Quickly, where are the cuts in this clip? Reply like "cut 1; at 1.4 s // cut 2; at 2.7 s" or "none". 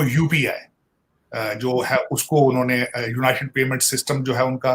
none